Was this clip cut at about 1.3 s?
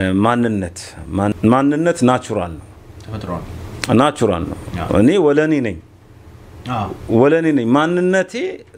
yes; 1 cut; at 1.3 s

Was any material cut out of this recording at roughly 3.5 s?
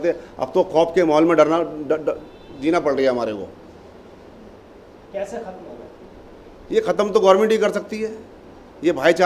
no; 0 cuts

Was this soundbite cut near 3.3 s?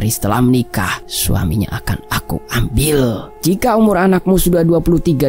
yes; 2 cuts; at 1.1 s, 3.3 s

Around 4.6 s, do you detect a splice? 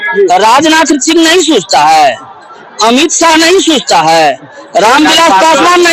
no; 0 cuts

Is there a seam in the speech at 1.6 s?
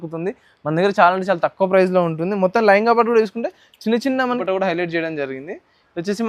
no; 1 cut; at 4.4 s

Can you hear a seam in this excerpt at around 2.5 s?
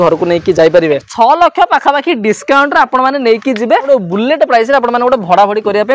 no; 2 cuts; at 1.1 s, 3.9 s

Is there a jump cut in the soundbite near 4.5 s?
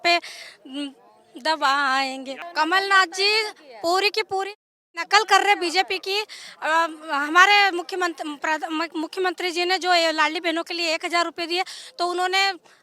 no; 1 cut; at 2.3 s

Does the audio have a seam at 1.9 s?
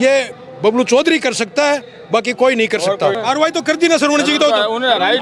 no; 1 cut; at 3.2 s

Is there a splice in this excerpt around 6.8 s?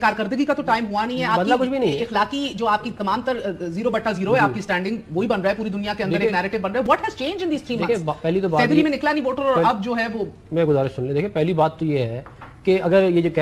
no; 0 cuts

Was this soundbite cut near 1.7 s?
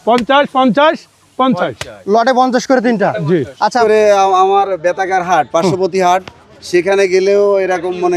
no; 1 cut; at 3.8 s

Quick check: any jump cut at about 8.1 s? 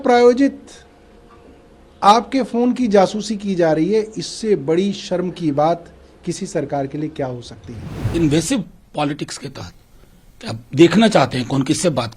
yes; 1 cut; at 8.1 s

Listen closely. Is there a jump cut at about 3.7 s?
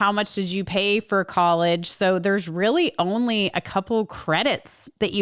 no; 0 cuts

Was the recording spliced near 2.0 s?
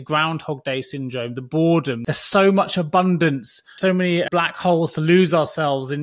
yes; 2 cuts; at 2.0 s, 4.0 s

